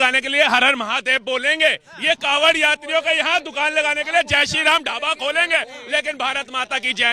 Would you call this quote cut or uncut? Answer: uncut